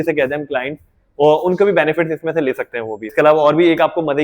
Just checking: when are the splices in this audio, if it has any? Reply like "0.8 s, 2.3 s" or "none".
3.0 s